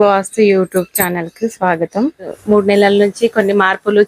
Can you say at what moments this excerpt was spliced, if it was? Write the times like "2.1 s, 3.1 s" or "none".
2.3 s